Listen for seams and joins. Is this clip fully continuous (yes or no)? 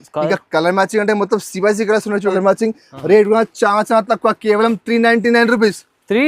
no